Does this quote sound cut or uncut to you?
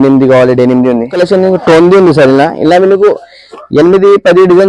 cut